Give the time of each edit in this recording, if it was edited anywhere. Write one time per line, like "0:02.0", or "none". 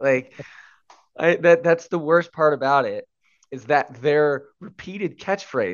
none